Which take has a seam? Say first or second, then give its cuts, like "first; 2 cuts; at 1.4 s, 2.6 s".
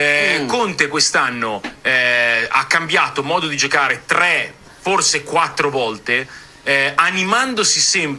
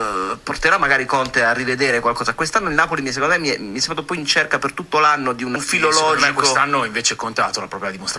second; 1 cut; at 5.7 s